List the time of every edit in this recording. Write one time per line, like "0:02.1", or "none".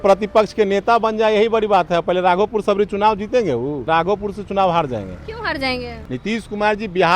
0:03.9
0:05.9